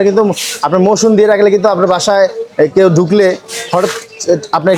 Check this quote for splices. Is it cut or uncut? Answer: uncut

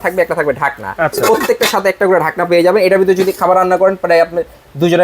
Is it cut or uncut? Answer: uncut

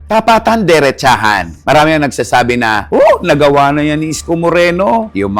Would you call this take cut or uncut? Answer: uncut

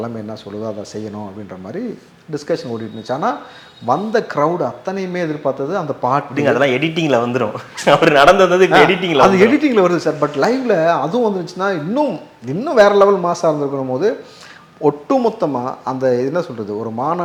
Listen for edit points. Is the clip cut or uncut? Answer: uncut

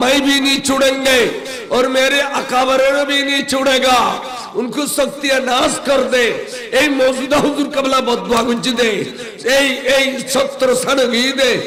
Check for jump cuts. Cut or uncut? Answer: uncut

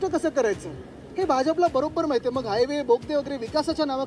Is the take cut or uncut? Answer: uncut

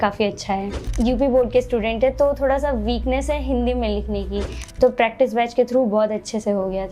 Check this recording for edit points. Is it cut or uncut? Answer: cut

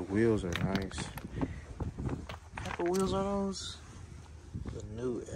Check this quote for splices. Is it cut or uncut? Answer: uncut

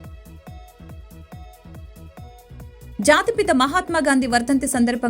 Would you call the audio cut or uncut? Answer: cut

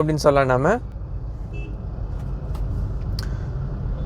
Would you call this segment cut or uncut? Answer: uncut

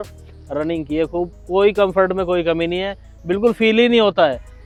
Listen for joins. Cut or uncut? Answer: uncut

